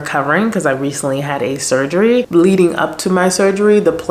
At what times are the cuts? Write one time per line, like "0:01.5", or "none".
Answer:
0:02.3